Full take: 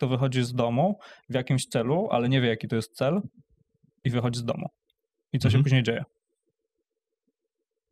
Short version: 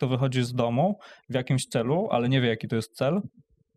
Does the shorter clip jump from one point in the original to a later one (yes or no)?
no